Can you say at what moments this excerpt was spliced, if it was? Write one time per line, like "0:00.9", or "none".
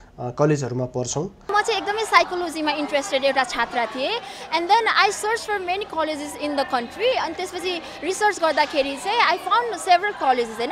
0:01.5